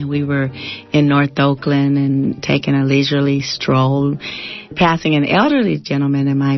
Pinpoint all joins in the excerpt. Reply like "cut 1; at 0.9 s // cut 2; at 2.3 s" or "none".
cut 1; at 2.4 s // cut 2; at 4.7 s